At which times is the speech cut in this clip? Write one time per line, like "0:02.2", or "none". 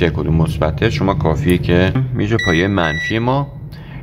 0:02.0